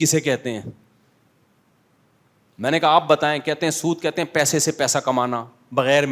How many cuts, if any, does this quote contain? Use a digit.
0